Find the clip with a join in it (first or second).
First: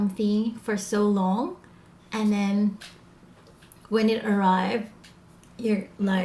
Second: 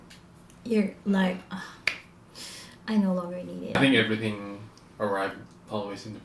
second